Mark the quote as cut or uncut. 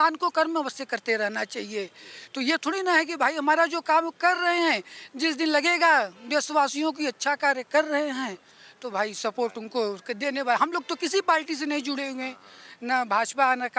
uncut